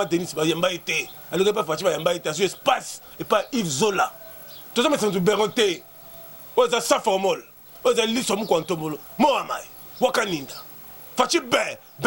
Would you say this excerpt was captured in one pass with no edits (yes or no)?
yes